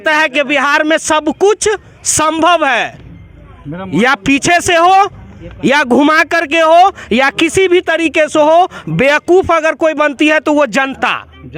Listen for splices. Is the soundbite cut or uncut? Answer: uncut